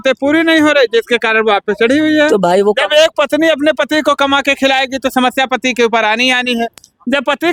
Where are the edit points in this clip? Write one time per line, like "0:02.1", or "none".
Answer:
none